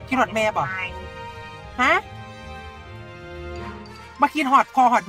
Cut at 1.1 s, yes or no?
no